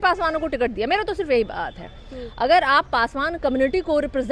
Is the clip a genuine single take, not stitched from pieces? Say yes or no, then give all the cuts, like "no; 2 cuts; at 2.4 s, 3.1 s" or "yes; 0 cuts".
yes; 0 cuts